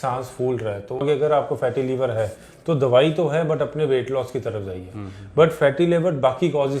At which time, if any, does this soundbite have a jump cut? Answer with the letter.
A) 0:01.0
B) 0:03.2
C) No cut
A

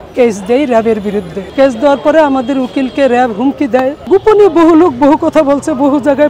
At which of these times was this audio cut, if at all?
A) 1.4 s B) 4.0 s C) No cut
B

